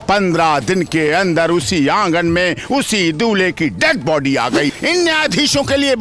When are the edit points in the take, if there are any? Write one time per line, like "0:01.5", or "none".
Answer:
0:04.8